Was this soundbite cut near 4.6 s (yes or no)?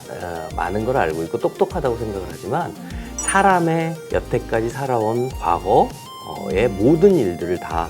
no